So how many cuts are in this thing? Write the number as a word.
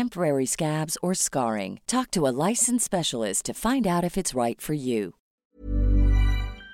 one